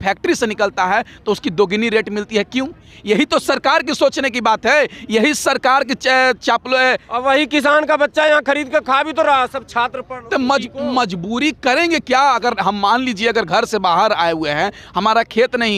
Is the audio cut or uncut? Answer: uncut